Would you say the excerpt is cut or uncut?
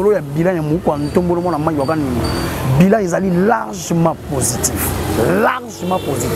uncut